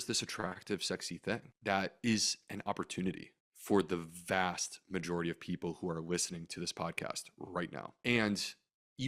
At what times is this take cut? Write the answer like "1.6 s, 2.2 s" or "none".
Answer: 1.5 s